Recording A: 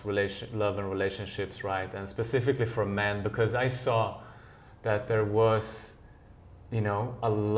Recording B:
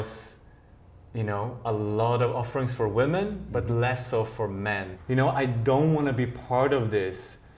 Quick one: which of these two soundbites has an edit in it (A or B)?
B